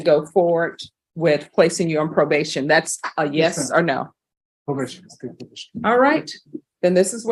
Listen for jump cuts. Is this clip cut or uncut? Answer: uncut